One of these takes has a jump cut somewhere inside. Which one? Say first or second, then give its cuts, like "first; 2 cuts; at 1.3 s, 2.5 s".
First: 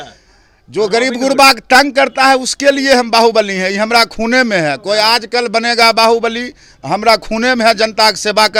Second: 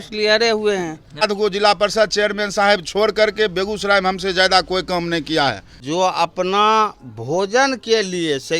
second; 2 cuts; at 1.2 s, 5.7 s